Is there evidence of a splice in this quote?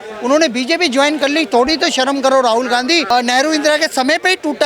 yes; 1 cut; at 3.1 s

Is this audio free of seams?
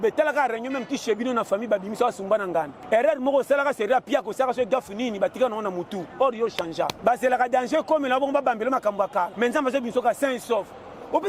no; 3 cuts; at 2.8 s, 6.9 s, 9.3 s

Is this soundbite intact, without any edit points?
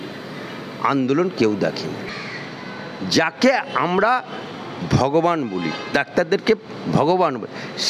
no; 1 cut; at 2.1 s

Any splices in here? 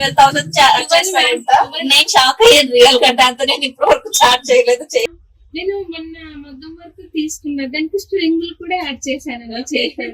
yes; 1 cut; at 5.1 s

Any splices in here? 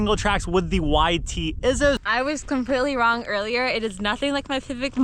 yes; 1 cut; at 2.0 s

